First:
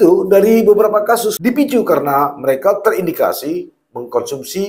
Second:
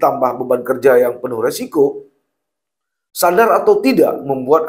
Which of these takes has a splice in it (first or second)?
first